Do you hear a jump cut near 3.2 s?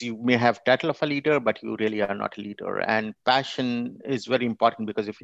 no; 0 cuts

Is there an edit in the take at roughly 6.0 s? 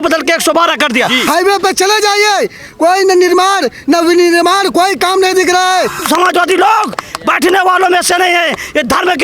yes; 2 cuts; at 1.2 s, 6.0 s

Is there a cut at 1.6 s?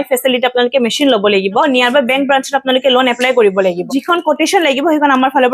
yes; 2 cuts; at 1.6 s, 3.8 s

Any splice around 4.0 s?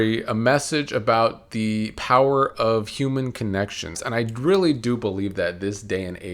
yes; 1 cut; at 4.0 s

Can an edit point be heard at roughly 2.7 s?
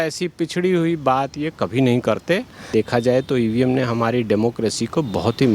yes; 1 cut; at 2.7 s

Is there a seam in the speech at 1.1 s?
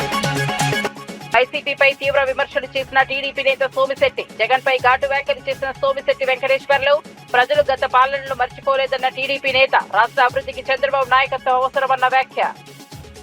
yes; 1 cut; at 1.1 s

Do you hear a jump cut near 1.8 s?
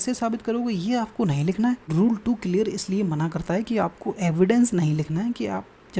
yes; 1 cut; at 1.8 s

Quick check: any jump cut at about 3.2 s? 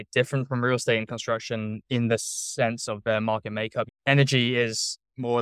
no; 0 cuts

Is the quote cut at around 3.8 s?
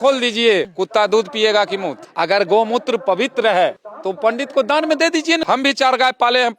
no; 2 cuts; at 2.0 s, 5.4 s

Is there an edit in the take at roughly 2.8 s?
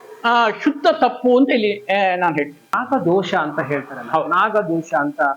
yes; 1 cut; at 2.8 s

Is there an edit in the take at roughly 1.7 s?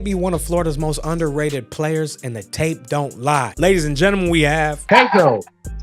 no; 2 cuts; at 3.5 s, 4.9 s

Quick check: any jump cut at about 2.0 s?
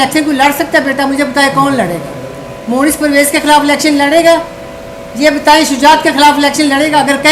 no; 0 cuts

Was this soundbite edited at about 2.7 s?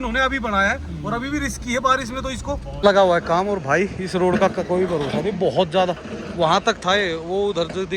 yes; 1 cut; at 2.7 s

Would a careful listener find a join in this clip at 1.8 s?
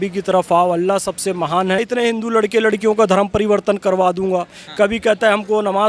yes; 1 cut; at 1.8 s

